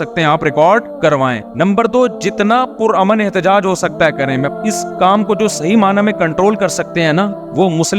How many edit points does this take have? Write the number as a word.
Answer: one